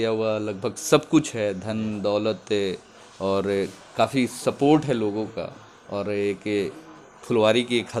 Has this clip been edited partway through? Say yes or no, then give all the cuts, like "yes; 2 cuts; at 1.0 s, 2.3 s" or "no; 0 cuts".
no; 0 cuts